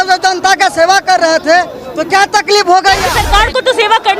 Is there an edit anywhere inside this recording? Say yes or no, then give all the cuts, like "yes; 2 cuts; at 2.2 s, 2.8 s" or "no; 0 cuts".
yes; 1 cut; at 3.2 s